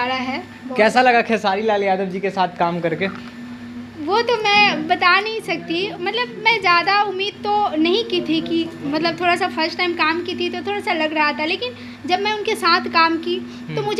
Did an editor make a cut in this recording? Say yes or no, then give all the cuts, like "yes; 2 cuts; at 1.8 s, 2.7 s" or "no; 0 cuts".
no; 0 cuts